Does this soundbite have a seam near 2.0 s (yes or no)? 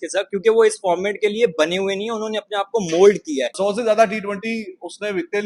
no